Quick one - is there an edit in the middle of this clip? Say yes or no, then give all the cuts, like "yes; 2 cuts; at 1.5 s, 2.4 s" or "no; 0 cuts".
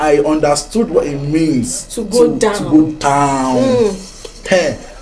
no; 0 cuts